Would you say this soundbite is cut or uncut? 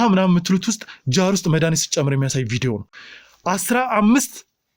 uncut